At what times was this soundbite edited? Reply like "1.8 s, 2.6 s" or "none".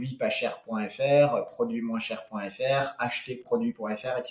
none